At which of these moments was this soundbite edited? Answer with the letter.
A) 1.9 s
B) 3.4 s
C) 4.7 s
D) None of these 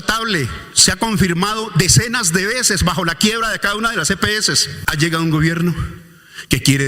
C